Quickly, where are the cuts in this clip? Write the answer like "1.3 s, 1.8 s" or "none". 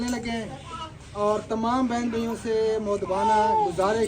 none